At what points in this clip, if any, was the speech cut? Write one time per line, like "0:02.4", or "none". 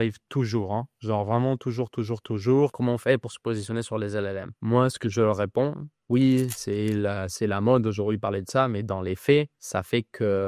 0:02.7
0:04.6
0:06.0